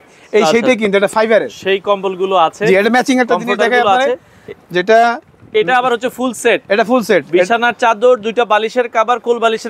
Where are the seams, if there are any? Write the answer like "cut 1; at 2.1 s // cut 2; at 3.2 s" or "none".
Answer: none